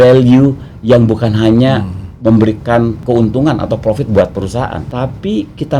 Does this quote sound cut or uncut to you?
cut